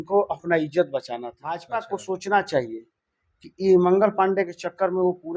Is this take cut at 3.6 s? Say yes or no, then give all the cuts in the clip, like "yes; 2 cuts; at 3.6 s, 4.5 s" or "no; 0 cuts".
no; 1 cut; at 1.6 s